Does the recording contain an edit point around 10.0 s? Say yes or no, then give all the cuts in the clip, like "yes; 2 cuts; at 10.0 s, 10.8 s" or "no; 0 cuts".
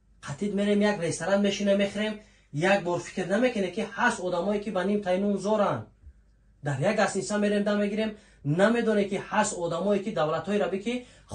no; 0 cuts